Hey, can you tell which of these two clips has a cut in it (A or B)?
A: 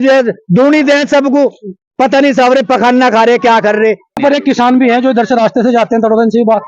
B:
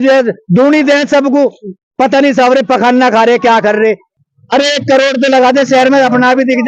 A